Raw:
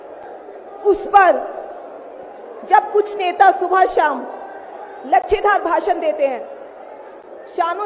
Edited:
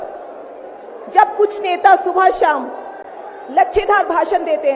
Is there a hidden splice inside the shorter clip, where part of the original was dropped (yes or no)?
no